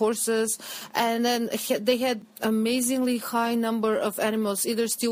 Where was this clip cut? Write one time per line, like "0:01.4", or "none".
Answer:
0:02.2